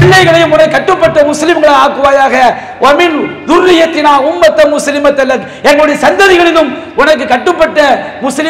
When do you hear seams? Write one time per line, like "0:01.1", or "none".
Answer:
none